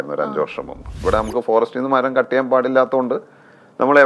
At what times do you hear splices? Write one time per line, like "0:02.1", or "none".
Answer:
0:01.0